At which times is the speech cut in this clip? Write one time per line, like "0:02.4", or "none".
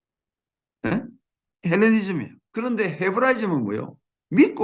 0:02.4